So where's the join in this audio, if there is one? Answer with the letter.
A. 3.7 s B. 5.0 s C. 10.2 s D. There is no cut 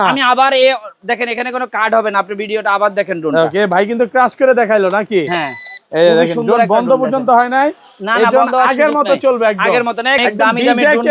C